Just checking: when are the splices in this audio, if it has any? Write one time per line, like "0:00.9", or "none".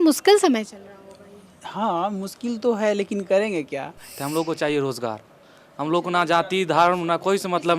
0:04.2